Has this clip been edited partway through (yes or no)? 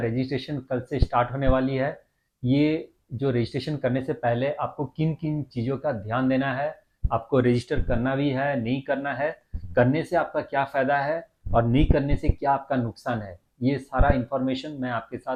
no